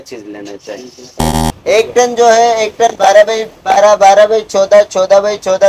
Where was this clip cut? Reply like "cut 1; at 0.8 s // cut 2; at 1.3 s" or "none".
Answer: cut 1; at 1.2 s